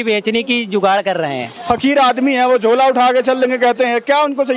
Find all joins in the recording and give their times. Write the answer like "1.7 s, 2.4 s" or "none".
none